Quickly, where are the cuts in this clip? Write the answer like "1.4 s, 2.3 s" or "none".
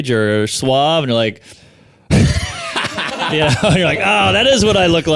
none